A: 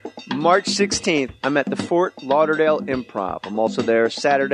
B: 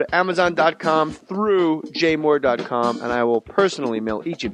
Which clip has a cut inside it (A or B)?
B